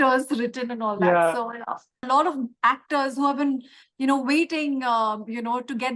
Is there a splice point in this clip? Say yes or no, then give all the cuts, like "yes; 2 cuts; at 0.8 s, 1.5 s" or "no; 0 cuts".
yes; 1 cut; at 2.0 s